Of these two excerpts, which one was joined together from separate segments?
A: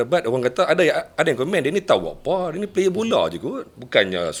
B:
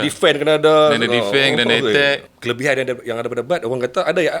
B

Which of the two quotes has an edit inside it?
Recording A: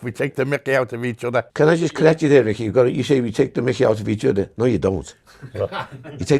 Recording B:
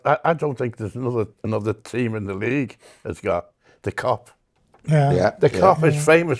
A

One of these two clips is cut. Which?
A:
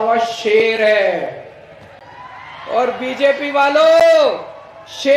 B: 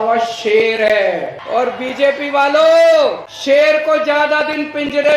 B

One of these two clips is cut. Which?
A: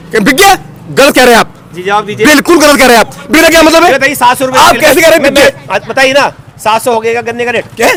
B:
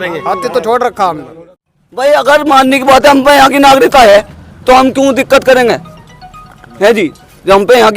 B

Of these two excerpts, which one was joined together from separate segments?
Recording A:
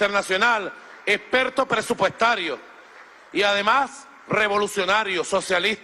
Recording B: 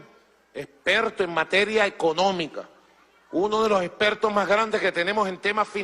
B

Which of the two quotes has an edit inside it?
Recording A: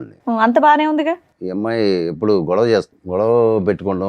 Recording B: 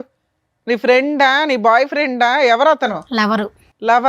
A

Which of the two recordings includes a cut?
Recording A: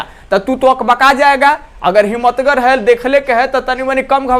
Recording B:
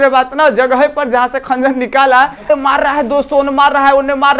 B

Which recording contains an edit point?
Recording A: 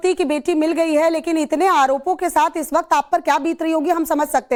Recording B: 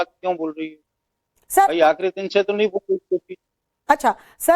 B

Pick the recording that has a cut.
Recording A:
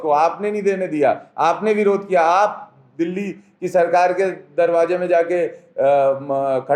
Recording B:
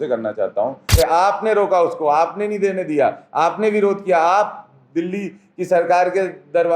B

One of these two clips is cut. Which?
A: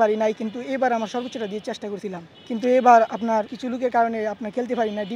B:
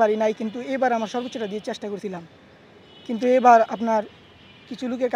A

